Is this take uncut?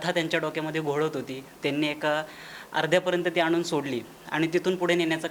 yes; 0 cuts

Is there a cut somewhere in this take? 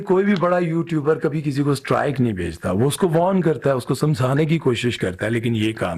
no; 0 cuts

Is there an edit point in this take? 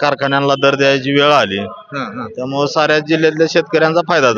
no; 0 cuts

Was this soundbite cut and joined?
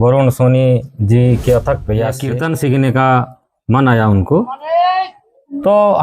yes; 1 cut; at 2.2 s

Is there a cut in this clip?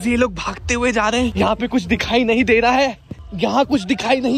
no; 0 cuts

